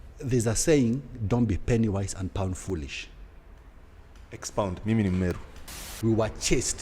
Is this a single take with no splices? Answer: no; 1 cut; at 5.9 s

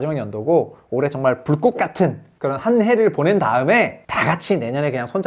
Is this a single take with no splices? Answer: no; 2 cuts; at 2.3 s, 4.0 s

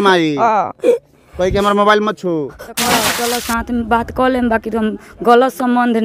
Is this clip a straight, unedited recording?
no; 1 cut; at 3.0 s

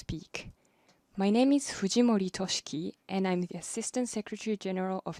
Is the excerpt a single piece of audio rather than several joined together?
yes; 0 cuts

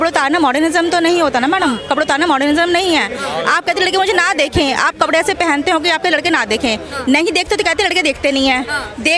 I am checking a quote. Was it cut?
no; 0 cuts

